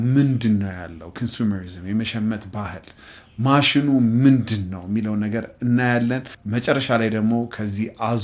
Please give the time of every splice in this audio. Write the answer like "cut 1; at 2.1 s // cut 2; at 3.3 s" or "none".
cut 1; at 6.3 s